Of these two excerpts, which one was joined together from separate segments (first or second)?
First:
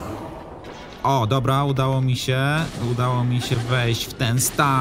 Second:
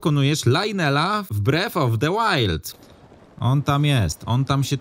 second